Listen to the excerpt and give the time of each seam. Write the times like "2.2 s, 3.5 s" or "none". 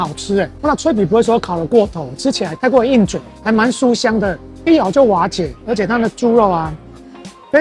none